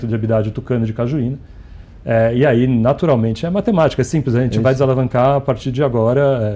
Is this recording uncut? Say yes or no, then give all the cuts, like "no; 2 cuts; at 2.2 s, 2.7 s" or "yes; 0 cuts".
yes; 0 cuts